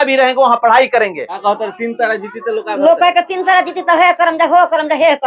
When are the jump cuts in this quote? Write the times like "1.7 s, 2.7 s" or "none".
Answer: 1.4 s

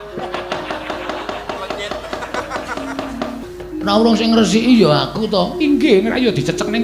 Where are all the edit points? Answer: 3.4 s

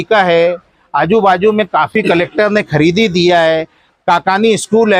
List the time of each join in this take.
none

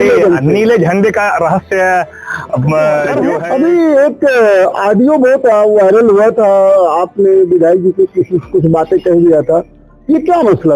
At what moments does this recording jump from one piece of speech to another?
3.3 s

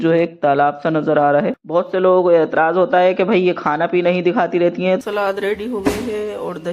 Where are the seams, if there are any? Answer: 1.6 s, 5.0 s

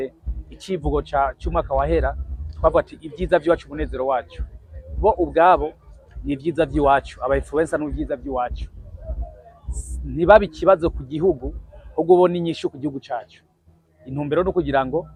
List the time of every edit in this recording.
none

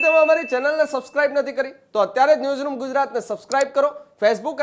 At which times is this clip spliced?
none

